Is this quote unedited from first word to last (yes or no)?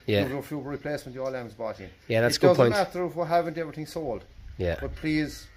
yes